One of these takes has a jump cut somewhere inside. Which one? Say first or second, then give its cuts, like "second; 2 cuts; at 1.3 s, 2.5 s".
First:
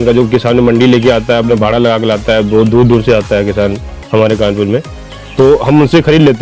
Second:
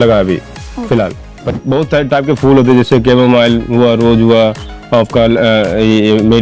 second; 1 cut; at 1.4 s